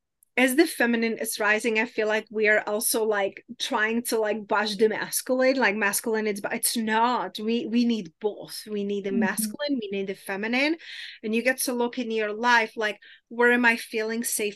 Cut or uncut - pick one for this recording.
uncut